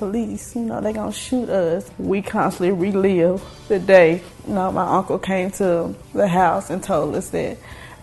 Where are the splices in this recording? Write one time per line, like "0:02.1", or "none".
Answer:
0:01.9
0:03.5
0:04.3
0:06.0